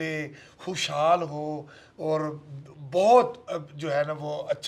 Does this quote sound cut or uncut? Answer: uncut